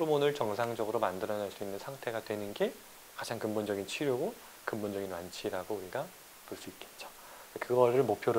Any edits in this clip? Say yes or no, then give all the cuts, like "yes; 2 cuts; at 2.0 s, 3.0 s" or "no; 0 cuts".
no; 0 cuts